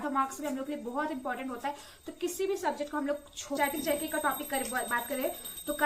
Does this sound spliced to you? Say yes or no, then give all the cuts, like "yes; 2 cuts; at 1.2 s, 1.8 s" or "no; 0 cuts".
yes; 1 cut; at 3.6 s